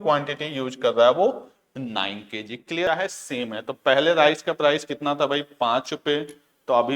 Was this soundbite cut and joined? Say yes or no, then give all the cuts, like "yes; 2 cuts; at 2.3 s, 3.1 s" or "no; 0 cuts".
yes; 1 cut; at 2.9 s